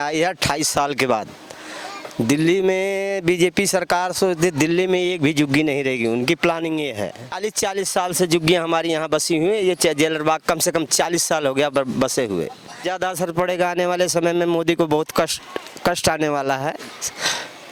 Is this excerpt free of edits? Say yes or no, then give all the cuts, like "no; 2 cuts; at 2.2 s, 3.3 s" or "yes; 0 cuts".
no; 2 cuts; at 7.4 s, 12.8 s